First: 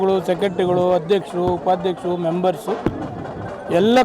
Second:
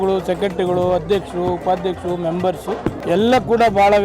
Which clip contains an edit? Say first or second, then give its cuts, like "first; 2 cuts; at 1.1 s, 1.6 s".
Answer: second; 1 cut; at 3.0 s